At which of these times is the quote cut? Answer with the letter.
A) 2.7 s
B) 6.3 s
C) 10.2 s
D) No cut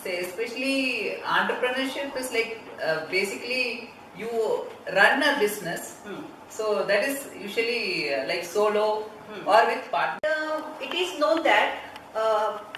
C